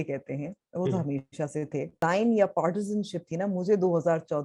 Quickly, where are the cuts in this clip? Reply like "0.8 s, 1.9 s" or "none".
2.0 s